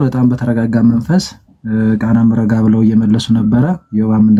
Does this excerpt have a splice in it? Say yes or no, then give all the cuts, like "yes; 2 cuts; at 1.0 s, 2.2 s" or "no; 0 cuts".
no; 0 cuts